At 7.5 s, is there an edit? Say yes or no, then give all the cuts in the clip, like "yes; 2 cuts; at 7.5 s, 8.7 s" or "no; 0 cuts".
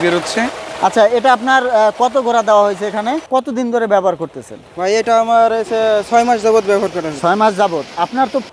no; 1 cut; at 3.2 s